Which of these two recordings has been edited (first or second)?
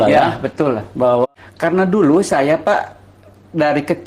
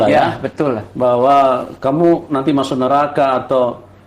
first